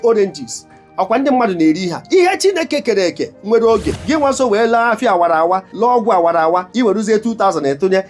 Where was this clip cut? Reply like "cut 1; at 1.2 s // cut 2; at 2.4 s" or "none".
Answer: cut 1; at 3.9 s // cut 2; at 5.7 s // cut 3; at 6.7 s